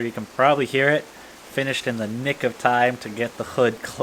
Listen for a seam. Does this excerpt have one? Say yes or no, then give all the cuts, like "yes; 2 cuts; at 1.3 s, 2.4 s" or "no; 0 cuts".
no; 0 cuts